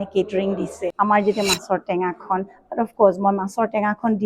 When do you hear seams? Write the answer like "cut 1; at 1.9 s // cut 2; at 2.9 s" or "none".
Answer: cut 1; at 0.9 s